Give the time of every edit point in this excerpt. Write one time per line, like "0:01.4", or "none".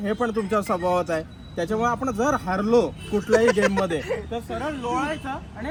none

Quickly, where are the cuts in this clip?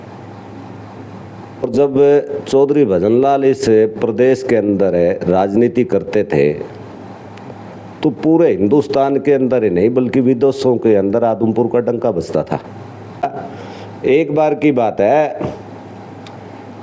0:01.6
0:13.2

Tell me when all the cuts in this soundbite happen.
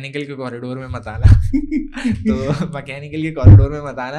none

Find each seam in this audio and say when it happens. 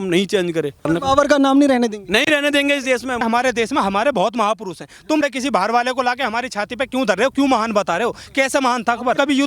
0:00.9
0:03.2

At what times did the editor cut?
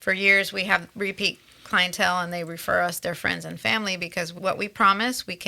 0:04.3

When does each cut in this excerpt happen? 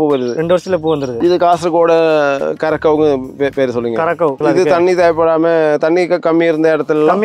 0:01.1
0:04.4

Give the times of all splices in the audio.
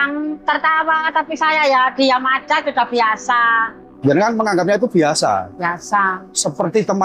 0:03.9

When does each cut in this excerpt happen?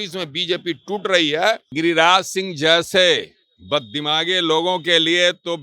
0:01.7

